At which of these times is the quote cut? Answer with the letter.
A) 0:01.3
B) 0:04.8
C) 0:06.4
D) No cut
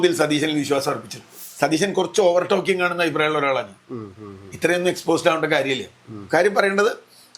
A